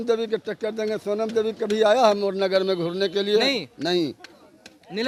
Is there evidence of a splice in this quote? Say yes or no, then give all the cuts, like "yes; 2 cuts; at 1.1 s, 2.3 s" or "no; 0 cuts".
no; 0 cuts